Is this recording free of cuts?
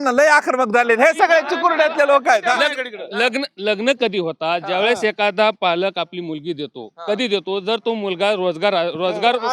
yes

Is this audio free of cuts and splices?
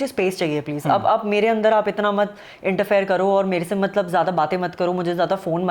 yes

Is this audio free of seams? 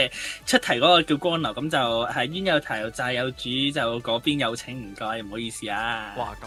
yes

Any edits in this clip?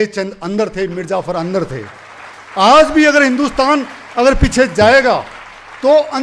no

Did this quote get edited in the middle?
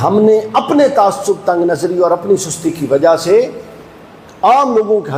no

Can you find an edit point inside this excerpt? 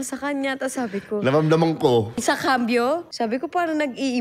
yes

